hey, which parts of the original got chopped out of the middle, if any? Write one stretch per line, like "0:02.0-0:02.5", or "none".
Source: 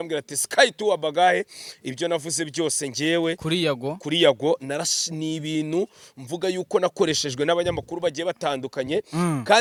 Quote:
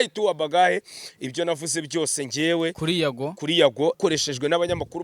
0:04.6-0:06.9